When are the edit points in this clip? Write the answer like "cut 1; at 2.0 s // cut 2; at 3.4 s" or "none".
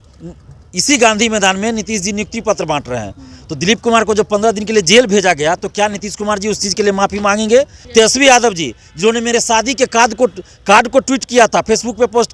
cut 1; at 7.8 s